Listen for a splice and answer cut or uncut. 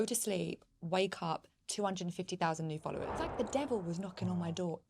cut